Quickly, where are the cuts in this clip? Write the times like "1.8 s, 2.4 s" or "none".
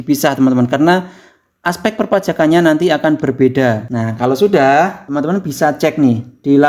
3.9 s, 5.0 s